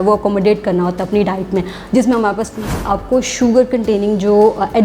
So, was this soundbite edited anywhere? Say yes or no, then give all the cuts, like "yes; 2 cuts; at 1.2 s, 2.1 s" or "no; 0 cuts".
yes; 1 cut; at 2.8 s